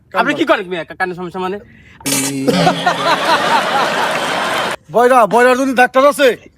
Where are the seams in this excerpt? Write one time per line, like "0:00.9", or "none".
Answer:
0:02.1
0:04.8